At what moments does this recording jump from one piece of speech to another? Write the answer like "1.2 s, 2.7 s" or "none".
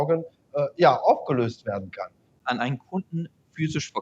2.4 s